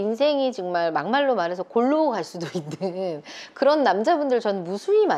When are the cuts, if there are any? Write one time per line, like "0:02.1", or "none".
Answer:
none